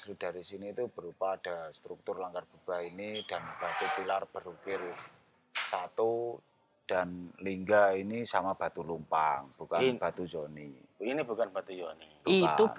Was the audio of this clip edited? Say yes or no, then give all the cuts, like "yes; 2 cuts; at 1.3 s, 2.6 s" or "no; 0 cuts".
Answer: no; 0 cuts